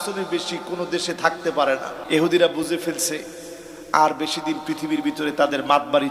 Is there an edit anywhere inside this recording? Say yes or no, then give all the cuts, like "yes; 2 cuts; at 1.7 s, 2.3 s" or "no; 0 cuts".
yes; 1 cut; at 2.0 s